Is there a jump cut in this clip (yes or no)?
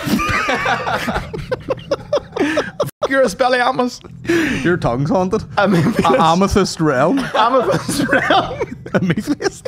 no